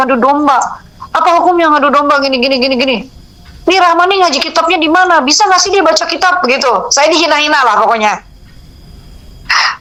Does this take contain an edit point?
no; 0 cuts

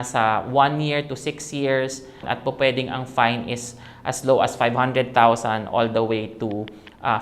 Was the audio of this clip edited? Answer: yes; 1 cut; at 2.3 s

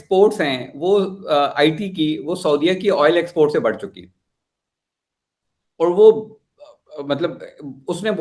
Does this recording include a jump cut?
no; 0 cuts

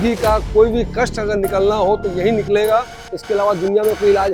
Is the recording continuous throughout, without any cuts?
yes; 0 cuts

